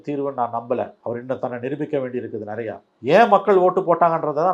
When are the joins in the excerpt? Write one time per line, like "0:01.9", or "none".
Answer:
0:01.0
0:02.9